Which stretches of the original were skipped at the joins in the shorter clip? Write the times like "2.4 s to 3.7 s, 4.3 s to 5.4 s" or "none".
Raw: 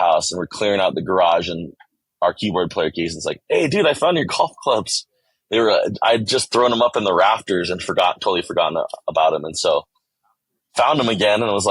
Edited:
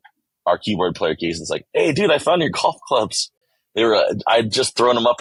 none